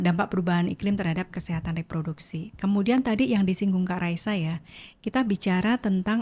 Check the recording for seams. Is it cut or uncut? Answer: uncut